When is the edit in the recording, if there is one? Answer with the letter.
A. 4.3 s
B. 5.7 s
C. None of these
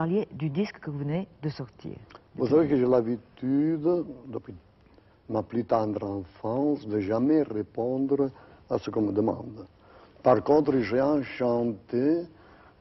B